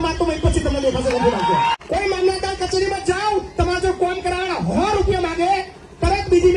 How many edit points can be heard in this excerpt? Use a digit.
1